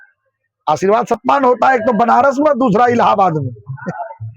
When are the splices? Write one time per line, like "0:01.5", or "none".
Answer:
0:01.2